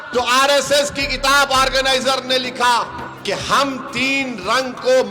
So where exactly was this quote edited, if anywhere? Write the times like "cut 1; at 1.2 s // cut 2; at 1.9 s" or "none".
cut 1; at 3.1 s